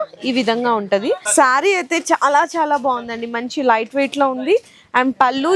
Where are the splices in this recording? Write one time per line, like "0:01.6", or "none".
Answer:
0:01.2